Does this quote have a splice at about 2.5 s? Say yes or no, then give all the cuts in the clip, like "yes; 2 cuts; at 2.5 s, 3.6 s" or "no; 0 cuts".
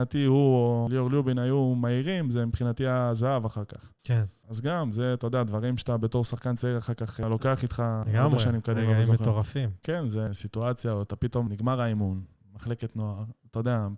no; 6 cuts; at 0.9 s, 4.3 s, 7.2 s, 8.1 s, 10.3 s, 11.5 s